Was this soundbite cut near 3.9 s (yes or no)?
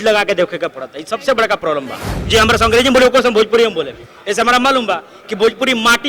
no